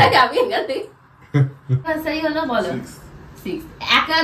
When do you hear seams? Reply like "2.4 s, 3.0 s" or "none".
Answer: 1.8 s